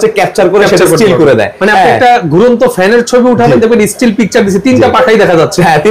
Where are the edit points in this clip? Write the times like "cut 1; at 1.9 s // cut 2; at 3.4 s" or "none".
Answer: none